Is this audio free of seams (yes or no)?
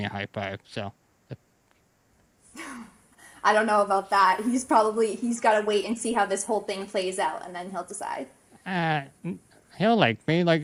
yes